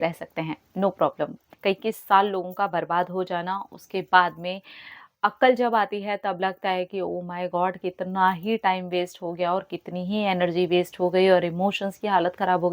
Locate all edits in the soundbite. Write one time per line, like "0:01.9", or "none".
0:01.5